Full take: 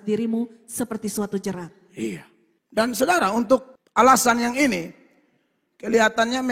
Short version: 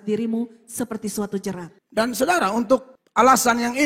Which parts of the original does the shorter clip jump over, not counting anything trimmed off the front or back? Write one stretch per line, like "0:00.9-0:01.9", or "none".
0:01.7-0:02.5